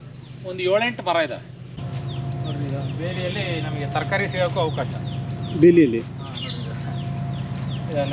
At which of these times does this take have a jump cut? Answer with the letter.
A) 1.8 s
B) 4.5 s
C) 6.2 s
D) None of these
A